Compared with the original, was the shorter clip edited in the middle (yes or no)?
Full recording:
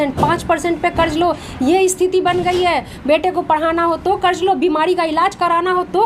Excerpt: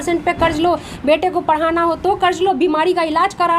yes